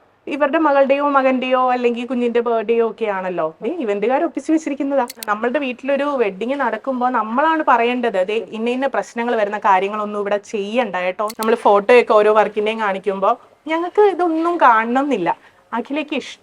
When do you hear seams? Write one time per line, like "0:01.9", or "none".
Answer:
0:05.3
0:11.3